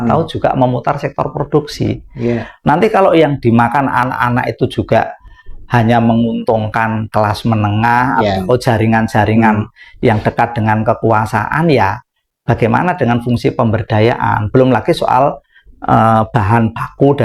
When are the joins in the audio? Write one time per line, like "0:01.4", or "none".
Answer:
none